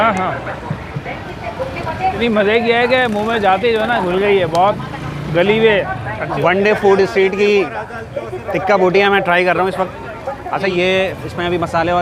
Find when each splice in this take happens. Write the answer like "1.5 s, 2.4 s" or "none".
2.2 s, 6.4 s, 10.7 s